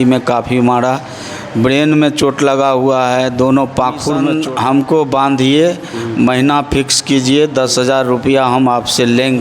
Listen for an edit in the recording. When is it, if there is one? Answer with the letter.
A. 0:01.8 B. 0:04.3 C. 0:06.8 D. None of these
B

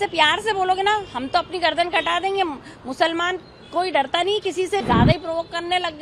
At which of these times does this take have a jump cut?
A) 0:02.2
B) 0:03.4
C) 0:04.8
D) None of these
C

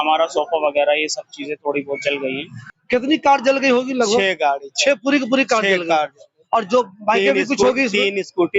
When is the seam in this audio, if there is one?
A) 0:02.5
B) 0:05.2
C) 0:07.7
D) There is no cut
A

